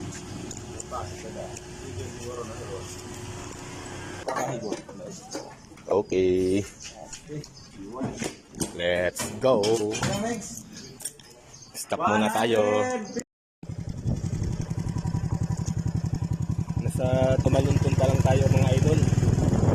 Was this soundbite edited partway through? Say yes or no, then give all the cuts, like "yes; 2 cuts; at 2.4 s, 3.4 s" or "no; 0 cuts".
no; 0 cuts